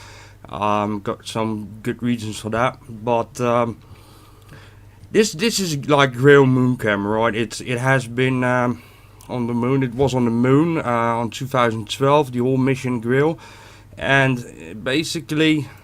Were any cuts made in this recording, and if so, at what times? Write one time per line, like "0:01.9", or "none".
none